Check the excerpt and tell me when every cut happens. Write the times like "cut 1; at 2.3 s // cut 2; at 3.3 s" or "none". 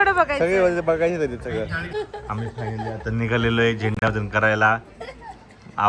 cut 1; at 1.8 s